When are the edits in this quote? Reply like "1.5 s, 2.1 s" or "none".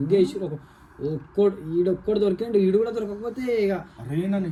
none